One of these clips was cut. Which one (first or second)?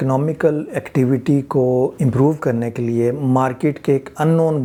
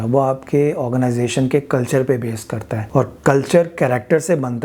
second